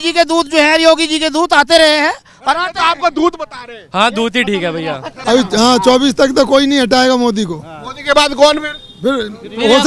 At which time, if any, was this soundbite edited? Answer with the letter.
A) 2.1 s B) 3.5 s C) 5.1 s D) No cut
C